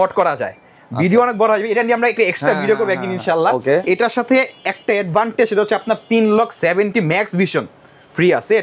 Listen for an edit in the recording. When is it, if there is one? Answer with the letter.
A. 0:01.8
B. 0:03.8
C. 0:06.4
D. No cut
B